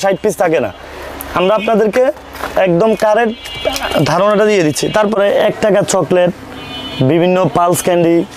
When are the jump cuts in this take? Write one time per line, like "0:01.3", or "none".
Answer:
0:05.2